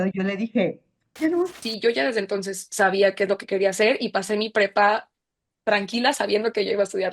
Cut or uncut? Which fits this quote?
cut